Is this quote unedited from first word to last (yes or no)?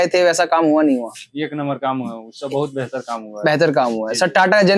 yes